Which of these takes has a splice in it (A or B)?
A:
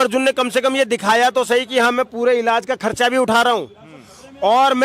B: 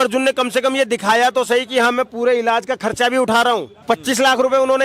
B